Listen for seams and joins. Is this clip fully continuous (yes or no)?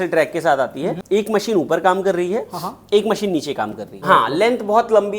no